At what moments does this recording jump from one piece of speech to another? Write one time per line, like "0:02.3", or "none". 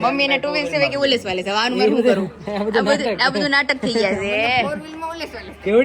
none